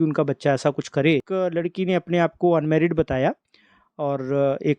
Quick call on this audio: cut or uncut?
cut